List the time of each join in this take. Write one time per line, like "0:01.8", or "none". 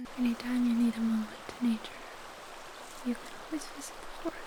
none